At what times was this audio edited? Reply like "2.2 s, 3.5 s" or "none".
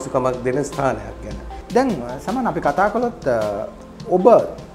none